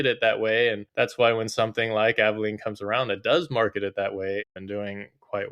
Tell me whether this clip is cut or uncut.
cut